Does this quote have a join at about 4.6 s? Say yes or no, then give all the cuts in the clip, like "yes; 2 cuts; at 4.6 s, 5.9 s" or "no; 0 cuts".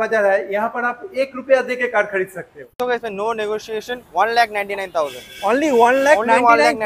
no; 1 cut; at 2.8 s